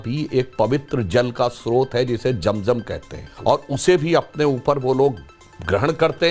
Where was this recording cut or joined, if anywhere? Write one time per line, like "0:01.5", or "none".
0:03.3

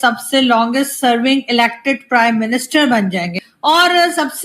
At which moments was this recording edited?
0:03.4

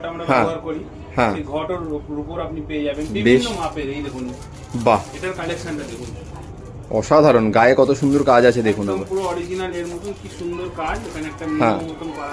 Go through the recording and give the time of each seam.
none

